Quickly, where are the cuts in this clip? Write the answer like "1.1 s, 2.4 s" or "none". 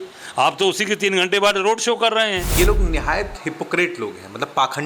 2.5 s